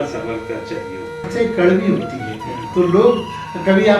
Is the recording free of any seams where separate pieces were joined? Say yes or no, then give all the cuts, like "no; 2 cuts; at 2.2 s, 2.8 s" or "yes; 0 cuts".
no; 1 cut; at 1.2 s